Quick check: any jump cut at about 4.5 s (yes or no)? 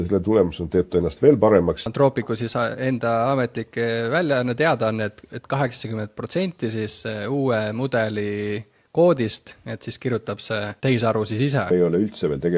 no